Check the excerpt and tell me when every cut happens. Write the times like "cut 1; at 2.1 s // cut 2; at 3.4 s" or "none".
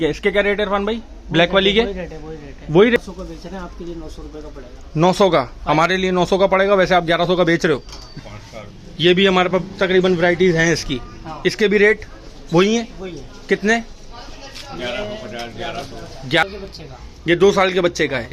cut 1; at 3.0 s // cut 2; at 8.0 s // cut 3; at 16.4 s